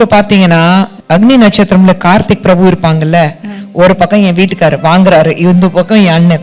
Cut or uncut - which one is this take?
cut